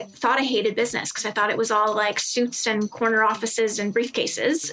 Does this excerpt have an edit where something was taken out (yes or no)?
no